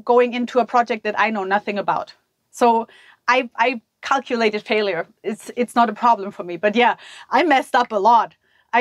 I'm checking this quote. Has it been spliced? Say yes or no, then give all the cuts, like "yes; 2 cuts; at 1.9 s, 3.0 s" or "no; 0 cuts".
no; 0 cuts